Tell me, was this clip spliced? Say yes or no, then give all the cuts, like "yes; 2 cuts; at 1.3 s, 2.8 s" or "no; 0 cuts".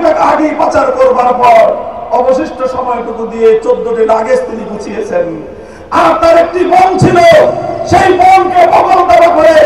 no; 0 cuts